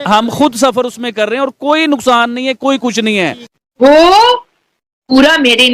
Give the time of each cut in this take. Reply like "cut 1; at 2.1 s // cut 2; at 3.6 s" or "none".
cut 1; at 3.5 s